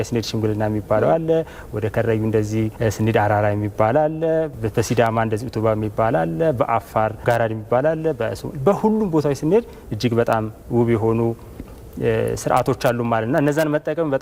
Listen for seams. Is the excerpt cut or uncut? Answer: cut